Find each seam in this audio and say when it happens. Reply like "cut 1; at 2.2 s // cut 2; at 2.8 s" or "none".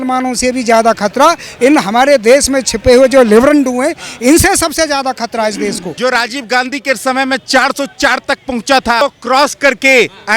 cut 1; at 5.9 s // cut 2; at 9.0 s